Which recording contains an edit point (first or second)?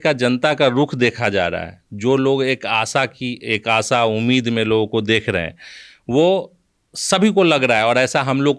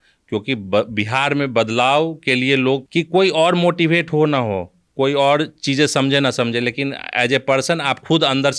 second